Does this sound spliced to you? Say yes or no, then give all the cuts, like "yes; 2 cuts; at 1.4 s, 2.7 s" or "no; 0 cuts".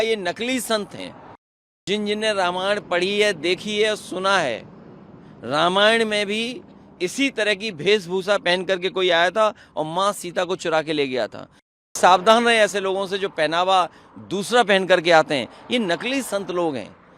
yes; 2 cuts; at 1.8 s, 11.9 s